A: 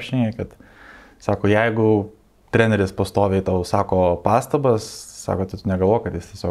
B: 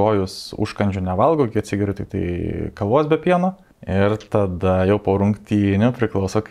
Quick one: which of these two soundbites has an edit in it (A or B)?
B